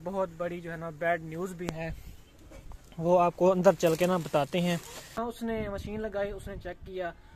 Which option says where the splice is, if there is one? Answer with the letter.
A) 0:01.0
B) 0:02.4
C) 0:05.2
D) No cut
C